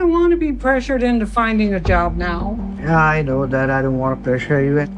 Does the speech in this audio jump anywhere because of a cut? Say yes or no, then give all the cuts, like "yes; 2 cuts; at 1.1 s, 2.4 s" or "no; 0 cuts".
no; 0 cuts